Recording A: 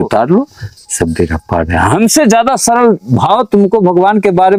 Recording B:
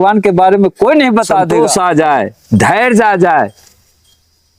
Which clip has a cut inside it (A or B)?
B